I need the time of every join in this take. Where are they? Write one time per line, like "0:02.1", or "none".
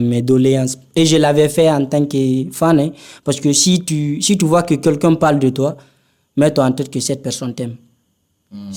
none